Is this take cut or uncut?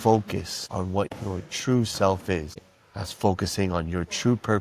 cut